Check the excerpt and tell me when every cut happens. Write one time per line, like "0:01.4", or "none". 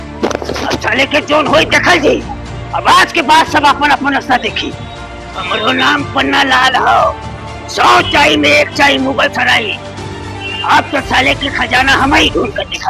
0:05.4